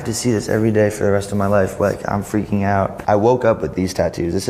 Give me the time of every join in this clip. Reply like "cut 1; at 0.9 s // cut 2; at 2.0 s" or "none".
cut 1; at 3.0 s